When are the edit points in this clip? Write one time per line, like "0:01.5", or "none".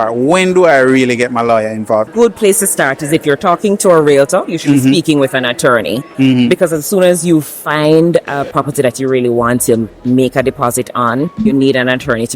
0:02.1
0:06.0